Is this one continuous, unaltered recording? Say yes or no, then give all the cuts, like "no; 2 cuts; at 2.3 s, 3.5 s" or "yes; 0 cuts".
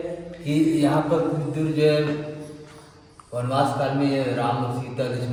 yes; 0 cuts